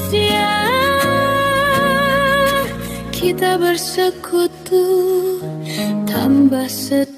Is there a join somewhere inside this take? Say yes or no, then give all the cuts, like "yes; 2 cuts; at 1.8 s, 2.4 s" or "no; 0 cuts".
no; 0 cuts